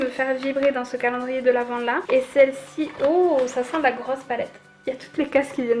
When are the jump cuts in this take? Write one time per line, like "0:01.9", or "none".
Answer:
0:02.0